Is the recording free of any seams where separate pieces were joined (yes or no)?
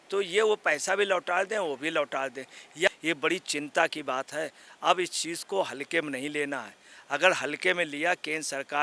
no